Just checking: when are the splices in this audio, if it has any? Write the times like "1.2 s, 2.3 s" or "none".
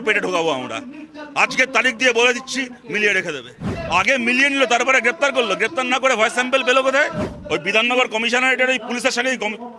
3.6 s, 7.3 s